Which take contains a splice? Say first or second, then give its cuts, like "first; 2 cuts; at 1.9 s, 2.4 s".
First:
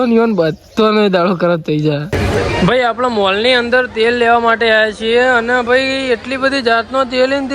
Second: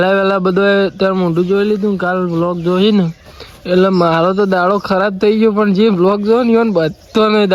first; 1 cut; at 2.1 s